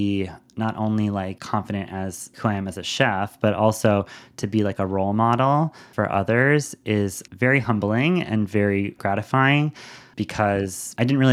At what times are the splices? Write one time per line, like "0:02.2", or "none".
0:01.4
0:02.4
0:05.8